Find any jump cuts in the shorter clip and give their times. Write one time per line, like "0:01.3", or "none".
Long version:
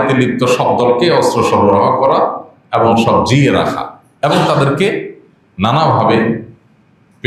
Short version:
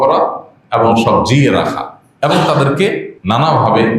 0:03.1